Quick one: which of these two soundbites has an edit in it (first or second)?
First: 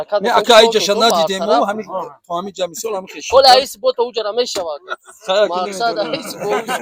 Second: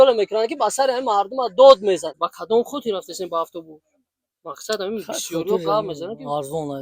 second